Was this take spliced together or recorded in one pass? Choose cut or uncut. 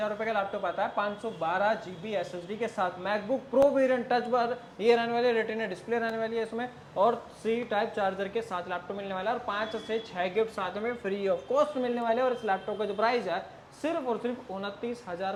uncut